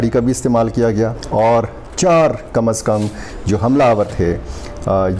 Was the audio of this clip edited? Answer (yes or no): yes